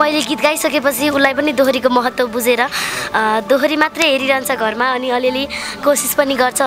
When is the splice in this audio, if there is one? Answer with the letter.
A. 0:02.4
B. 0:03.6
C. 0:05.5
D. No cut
D